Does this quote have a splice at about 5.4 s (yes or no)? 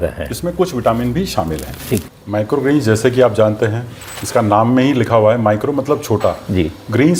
no